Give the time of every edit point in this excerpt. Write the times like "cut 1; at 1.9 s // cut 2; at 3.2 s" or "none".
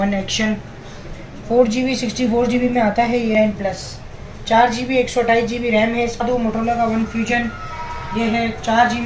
cut 1; at 3.3 s // cut 2; at 6.2 s